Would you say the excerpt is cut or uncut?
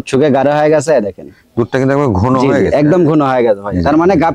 uncut